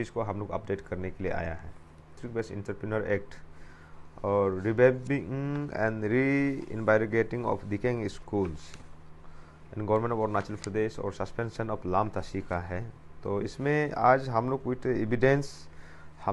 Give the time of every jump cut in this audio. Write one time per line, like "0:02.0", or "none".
0:02.2

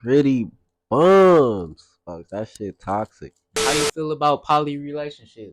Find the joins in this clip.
0:03.4

